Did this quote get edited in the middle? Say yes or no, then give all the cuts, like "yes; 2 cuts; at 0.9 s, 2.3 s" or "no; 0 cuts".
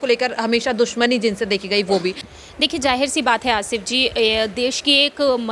yes; 1 cut; at 2.3 s